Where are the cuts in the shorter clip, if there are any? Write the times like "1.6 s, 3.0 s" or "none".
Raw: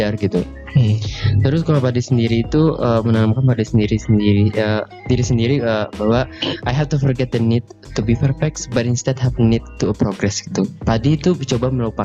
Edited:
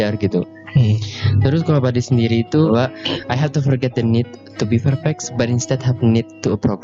2.7 s